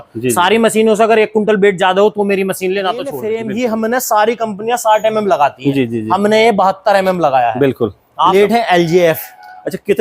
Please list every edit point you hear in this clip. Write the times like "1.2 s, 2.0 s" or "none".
3.2 s, 8.3 s